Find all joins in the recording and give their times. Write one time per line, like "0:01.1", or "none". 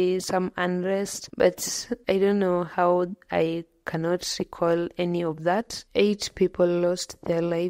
0:01.2
0:05.8